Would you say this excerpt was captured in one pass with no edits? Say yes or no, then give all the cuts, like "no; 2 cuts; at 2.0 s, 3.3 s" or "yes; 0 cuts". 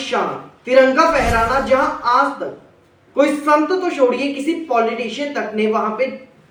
yes; 0 cuts